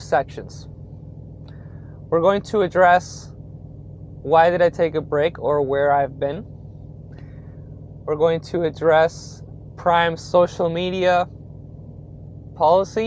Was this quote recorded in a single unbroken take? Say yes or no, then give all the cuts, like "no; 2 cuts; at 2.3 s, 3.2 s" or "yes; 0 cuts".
yes; 0 cuts